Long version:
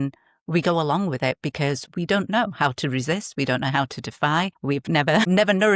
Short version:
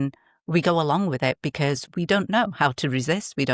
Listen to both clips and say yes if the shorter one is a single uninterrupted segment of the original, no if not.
yes